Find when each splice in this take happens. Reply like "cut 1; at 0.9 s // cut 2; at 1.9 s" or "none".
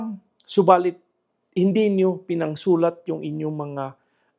none